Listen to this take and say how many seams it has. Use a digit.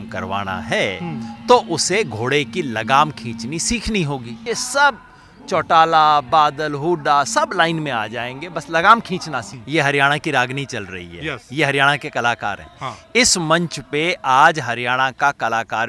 2